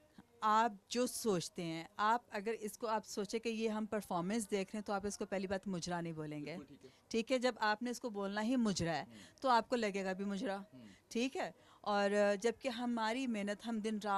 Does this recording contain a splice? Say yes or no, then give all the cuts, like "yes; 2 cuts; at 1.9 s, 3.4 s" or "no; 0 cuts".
no; 0 cuts